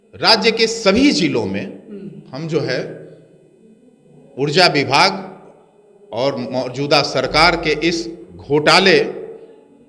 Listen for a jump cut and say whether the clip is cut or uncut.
uncut